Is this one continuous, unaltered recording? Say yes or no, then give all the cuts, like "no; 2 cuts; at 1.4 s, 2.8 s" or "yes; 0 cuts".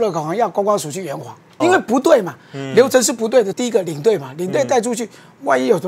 no; 2 cuts; at 1.6 s, 3.5 s